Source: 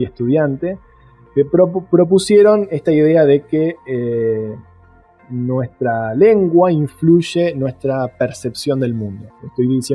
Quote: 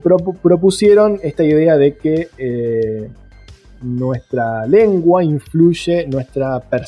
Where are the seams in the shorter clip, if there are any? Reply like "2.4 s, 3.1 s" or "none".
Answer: none